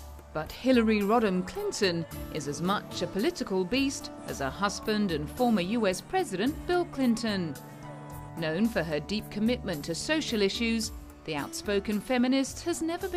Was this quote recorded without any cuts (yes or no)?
yes